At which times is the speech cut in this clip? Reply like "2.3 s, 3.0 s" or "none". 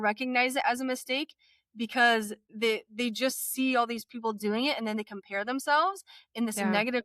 2.4 s